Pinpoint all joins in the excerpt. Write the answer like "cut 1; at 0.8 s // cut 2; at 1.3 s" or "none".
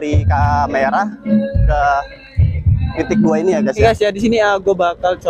cut 1; at 3.8 s

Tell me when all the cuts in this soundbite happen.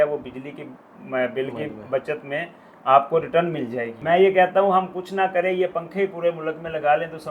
cut 1; at 3.9 s

